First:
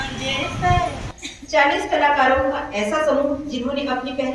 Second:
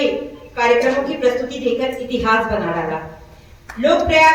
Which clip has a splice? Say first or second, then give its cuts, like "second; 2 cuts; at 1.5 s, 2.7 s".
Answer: first; 1 cut; at 1.1 s